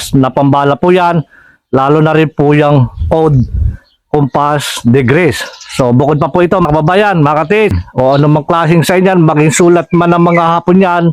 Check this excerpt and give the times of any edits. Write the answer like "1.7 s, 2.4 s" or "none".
6.7 s, 7.8 s